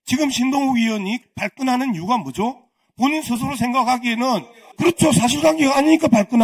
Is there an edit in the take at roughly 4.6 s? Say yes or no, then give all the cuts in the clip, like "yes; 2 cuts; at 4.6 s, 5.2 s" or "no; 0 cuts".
yes; 2 cuts; at 1.2 s, 4.6 s